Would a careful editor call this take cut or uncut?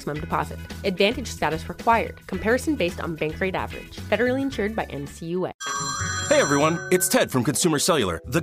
cut